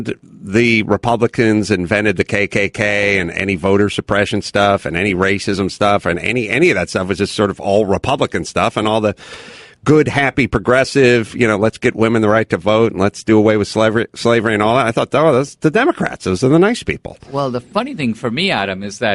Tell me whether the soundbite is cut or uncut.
cut